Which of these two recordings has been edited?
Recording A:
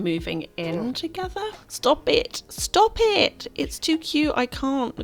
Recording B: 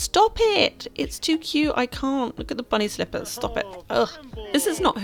A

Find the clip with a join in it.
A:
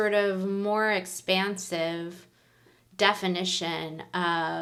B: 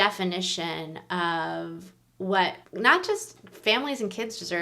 B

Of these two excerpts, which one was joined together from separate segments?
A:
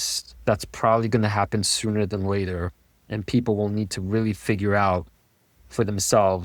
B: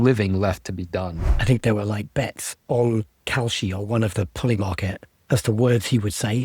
B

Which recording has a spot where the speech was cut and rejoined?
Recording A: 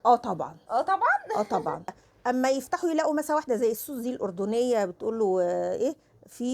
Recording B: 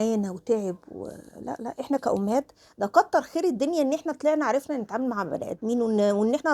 A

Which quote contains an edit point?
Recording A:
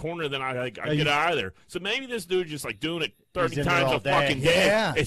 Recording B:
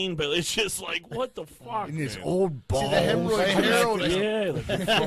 B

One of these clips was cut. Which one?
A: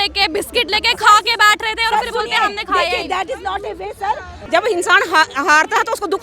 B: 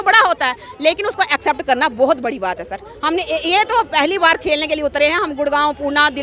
A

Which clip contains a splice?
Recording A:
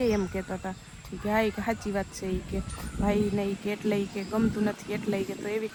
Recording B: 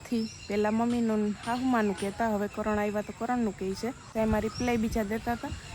B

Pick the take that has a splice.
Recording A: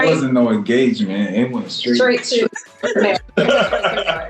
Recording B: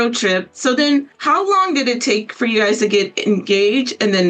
B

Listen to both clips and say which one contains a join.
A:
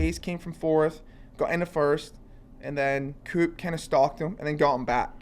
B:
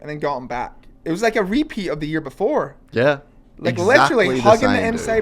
A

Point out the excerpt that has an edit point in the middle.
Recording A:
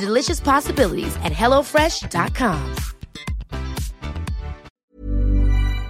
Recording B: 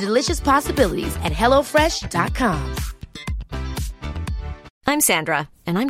A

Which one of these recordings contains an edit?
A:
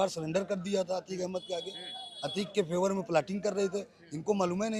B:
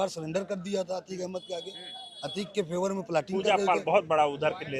B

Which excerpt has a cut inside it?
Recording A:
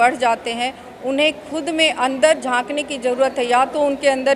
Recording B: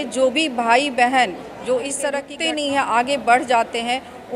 B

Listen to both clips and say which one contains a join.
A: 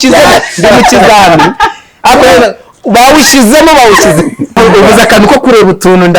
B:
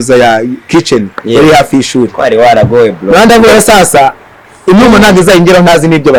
A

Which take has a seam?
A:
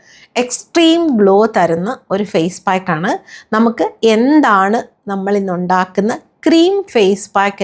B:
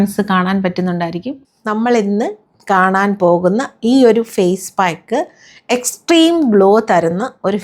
B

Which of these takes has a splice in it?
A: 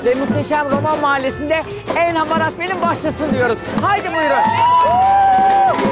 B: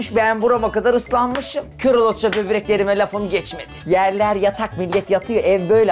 B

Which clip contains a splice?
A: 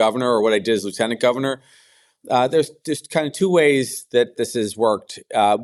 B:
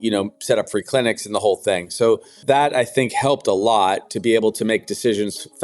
B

